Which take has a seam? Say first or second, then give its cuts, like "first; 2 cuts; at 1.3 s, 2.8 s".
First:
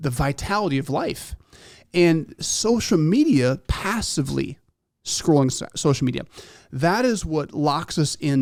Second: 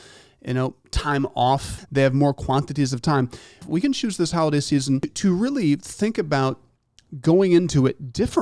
second; 3 cuts; at 1.8 s, 3.6 s, 5.1 s